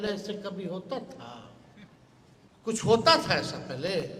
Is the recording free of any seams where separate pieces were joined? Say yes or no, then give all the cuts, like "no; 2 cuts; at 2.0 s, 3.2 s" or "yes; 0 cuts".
no; 1 cut; at 2.4 s